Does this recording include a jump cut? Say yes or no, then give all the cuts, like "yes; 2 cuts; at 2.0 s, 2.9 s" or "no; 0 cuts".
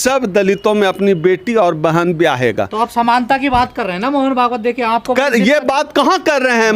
no; 0 cuts